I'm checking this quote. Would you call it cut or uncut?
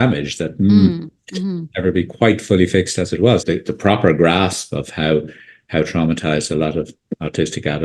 cut